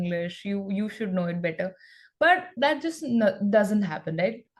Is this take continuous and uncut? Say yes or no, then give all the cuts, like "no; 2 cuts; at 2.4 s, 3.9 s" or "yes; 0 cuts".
yes; 0 cuts